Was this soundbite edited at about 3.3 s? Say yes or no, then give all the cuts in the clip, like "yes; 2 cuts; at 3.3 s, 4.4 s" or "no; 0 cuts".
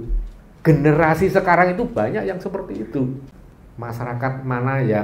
yes; 1 cut; at 3.3 s